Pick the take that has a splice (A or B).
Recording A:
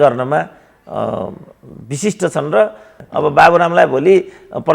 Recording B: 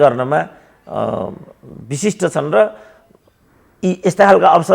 A